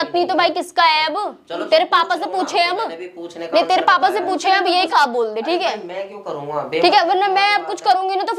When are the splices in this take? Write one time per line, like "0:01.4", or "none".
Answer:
0:04.7